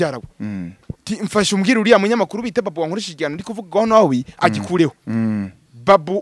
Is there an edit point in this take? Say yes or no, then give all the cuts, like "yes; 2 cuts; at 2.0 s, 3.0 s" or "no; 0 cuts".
no; 0 cuts